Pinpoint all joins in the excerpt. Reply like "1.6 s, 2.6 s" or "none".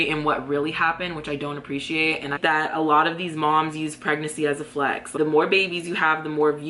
2.4 s, 5.1 s

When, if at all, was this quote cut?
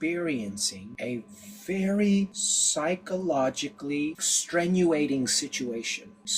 4.2 s

